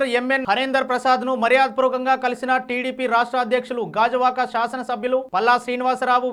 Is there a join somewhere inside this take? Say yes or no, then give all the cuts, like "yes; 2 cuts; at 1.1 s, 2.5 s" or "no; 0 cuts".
no; 0 cuts